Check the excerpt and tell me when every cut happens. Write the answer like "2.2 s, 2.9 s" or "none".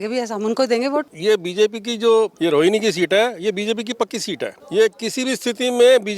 1.1 s, 2.3 s, 4.6 s